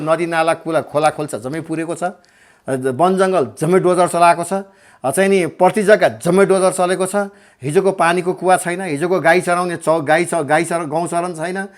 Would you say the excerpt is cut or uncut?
uncut